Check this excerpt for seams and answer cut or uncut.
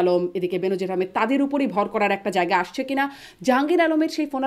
uncut